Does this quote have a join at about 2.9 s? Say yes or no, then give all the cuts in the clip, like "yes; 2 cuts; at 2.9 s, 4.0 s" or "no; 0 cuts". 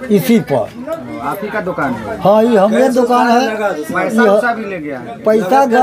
no; 0 cuts